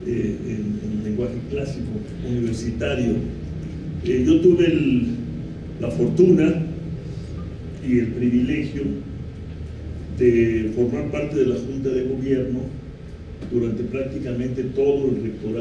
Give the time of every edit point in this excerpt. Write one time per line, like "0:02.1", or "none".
0:11.3